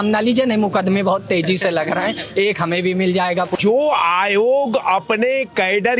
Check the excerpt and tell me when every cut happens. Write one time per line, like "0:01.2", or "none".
0:03.5